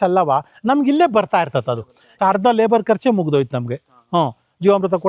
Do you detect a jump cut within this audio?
yes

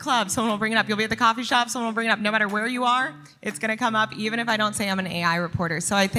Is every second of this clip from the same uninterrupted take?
yes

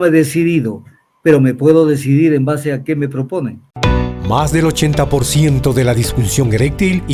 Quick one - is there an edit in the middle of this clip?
no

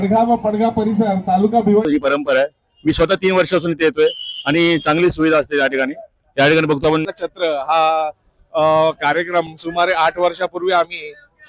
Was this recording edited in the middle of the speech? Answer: yes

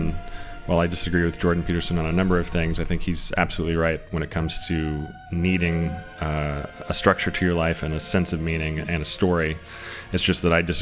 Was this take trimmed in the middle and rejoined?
no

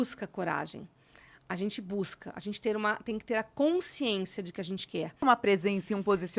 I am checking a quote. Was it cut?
yes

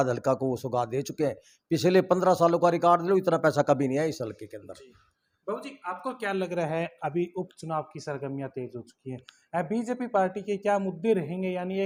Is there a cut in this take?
no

